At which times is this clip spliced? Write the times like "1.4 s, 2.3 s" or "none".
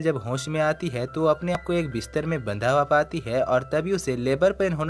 1.6 s